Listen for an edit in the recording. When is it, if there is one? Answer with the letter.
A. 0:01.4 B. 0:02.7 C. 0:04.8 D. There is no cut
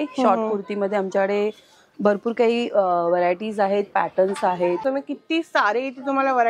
C